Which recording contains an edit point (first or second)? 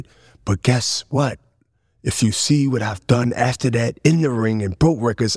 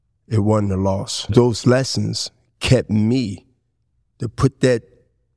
second